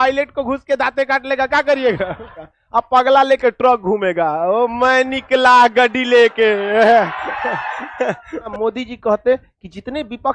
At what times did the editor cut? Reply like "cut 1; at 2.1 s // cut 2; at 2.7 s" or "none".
cut 1; at 2.3 s // cut 2; at 6.6 s // cut 3; at 8.5 s